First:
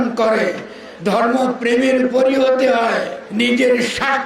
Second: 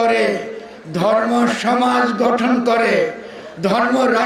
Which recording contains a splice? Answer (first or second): first